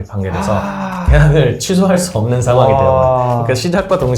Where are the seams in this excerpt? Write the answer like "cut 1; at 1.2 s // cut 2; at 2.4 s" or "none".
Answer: none